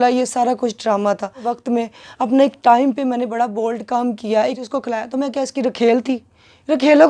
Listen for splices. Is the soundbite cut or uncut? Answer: cut